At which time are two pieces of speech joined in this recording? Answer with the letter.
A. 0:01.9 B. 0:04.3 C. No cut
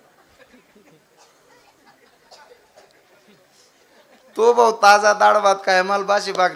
C